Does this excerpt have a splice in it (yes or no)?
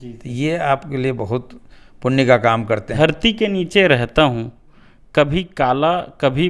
yes